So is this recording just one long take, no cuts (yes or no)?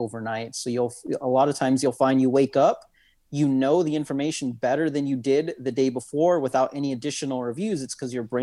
yes